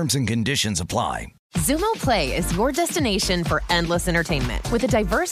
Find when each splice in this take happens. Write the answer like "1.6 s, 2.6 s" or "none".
1.3 s